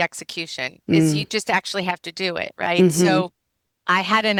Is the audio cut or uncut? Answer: uncut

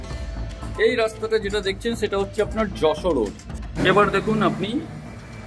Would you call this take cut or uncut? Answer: cut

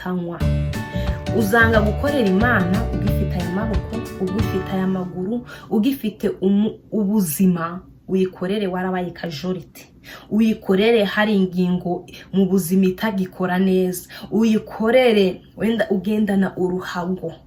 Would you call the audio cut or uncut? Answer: uncut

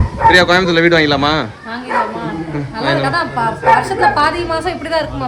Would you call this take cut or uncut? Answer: uncut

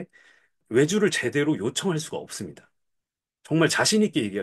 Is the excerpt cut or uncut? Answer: uncut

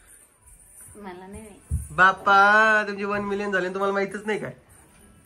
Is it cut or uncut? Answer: uncut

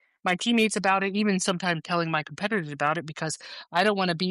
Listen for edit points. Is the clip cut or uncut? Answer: uncut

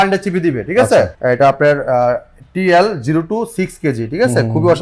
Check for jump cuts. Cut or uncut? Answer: cut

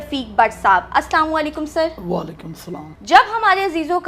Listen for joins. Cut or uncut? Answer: uncut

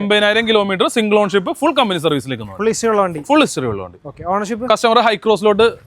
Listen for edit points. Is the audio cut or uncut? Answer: uncut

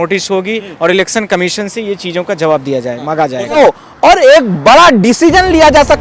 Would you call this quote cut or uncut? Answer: cut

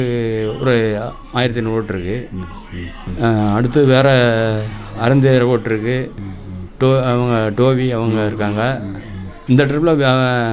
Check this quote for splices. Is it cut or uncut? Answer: uncut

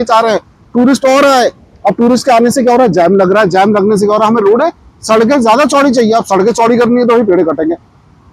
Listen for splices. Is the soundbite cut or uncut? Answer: uncut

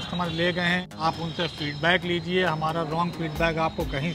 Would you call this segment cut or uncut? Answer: cut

